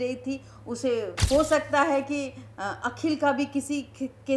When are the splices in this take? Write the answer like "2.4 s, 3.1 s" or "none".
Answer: 1.2 s